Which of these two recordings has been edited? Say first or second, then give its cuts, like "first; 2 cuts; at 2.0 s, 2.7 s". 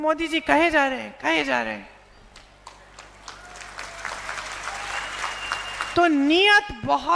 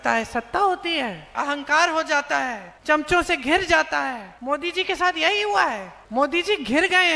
second; 4 cuts; at 1.3 s, 2.7 s, 4.3 s, 5.9 s